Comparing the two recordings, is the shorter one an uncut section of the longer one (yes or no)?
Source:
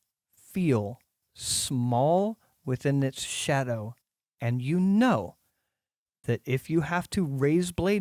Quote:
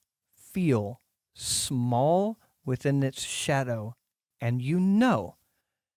yes